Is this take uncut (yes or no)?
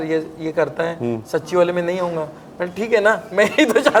yes